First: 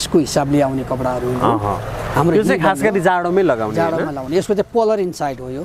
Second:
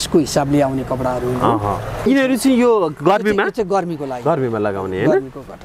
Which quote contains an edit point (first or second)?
second